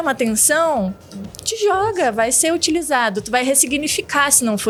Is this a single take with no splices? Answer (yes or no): yes